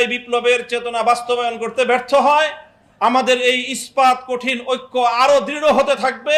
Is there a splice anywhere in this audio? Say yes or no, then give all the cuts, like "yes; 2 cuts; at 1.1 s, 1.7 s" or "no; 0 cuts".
no; 0 cuts